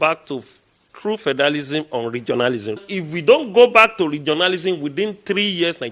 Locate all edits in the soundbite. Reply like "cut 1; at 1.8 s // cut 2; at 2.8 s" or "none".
cut 1; at 2.8 s